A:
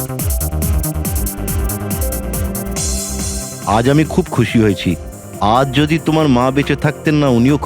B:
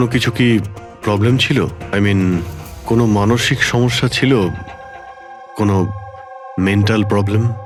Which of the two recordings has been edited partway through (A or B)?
A